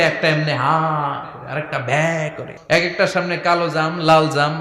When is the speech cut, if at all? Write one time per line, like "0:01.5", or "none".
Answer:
0:02.5

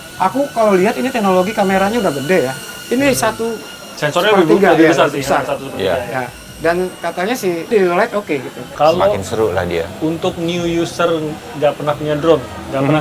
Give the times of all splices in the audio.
0:07.7
0:08.6

